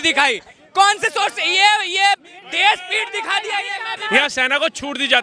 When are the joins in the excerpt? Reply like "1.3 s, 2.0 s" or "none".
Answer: 4.0 s